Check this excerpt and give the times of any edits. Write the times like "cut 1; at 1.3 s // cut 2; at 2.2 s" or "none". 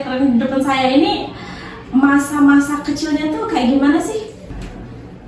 cut 1; at 4.3 s